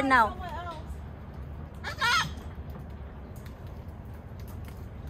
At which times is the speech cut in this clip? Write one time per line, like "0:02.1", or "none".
0:02.5